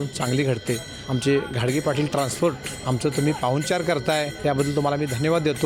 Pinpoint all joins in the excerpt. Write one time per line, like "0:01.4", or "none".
0:00.9
0:02.7
0:04.3